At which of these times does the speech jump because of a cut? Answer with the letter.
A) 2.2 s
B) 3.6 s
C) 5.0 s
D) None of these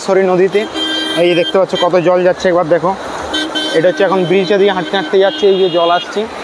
D